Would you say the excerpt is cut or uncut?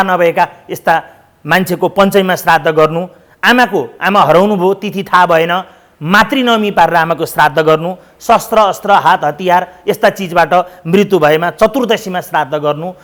uncut